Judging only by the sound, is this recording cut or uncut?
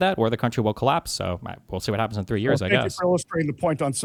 uncut